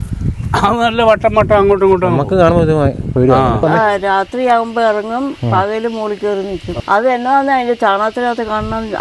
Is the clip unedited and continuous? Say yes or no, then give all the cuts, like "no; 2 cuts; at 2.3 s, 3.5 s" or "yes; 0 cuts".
no; 2 cuts; at 3.6 s, 6.7 s